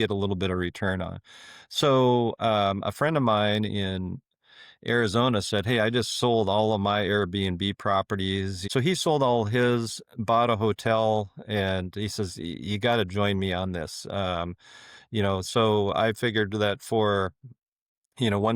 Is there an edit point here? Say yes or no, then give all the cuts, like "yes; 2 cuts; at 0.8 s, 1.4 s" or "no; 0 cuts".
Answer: yes; 1 cut; at 8.6 s